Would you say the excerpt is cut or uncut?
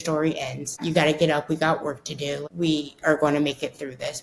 cut